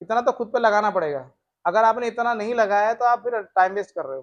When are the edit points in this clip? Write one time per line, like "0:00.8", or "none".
none